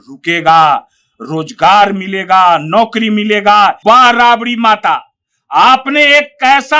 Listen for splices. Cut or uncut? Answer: cut